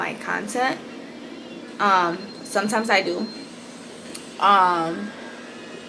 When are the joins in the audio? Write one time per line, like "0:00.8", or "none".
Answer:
none